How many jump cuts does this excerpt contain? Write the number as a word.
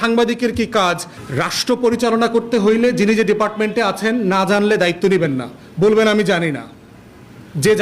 one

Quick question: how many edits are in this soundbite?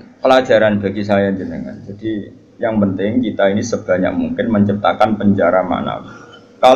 zero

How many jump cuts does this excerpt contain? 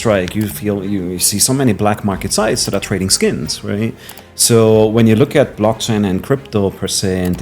zero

